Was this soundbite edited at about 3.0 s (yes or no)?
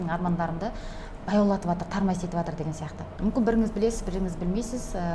yes